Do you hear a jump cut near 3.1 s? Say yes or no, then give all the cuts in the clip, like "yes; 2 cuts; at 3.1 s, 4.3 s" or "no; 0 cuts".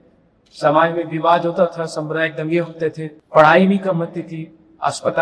yes; 1 cut; at 3.1 s